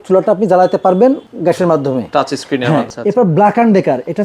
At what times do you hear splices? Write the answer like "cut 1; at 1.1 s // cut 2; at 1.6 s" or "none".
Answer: cut 1; at 1.3 s // cut 2; at 2.9 s